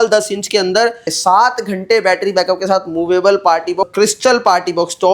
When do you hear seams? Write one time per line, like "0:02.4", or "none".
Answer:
0:01.1
0:03.9